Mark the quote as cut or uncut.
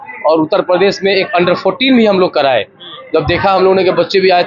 uncut